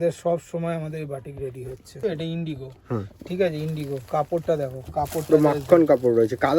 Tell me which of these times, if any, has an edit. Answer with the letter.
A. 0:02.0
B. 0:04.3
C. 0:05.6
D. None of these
A